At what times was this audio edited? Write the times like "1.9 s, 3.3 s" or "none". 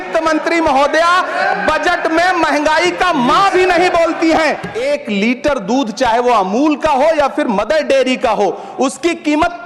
4.7 s